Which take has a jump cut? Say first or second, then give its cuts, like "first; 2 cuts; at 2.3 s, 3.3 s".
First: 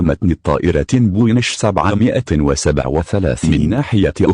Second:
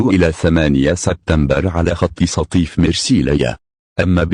first; 1 cut; at 3.4 s